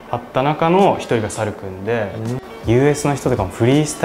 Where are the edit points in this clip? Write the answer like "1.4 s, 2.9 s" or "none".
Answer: 2.4 s